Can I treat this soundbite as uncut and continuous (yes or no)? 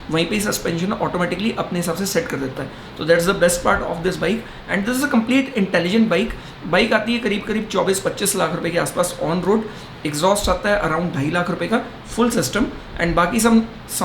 yes